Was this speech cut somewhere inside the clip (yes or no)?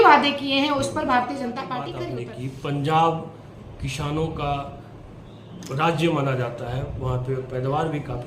yes